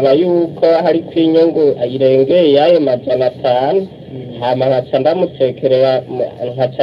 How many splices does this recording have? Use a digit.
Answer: 0